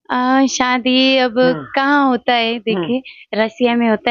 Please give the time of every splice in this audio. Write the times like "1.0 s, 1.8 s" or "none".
none

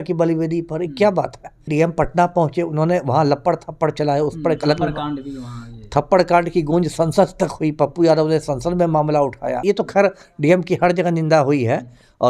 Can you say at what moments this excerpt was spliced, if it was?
1.7 s, 9.6 s

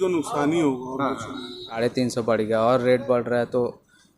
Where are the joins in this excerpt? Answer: 1.8 s

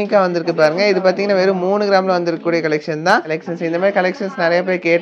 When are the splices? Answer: 3.3 s

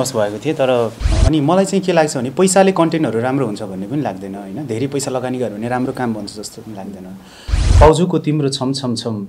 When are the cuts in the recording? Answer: 1.1 s, 7.6 s

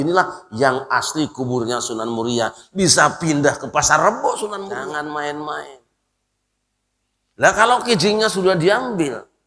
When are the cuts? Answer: 4.8 s

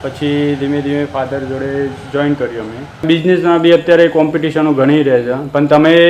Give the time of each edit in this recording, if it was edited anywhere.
3.1 s

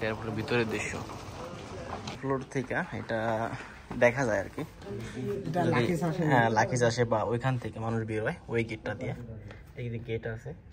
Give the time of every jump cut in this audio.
2.0 s

